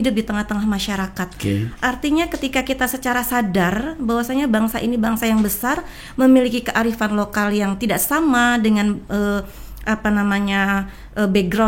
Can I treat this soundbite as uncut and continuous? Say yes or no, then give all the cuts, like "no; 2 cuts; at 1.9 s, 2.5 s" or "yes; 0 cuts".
yes; 0 cuts